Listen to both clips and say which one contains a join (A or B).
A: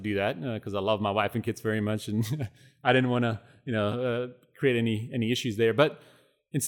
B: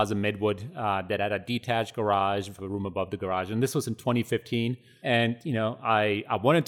B